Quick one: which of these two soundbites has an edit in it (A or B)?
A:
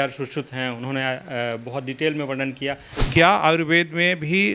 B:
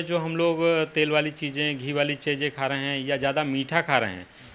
A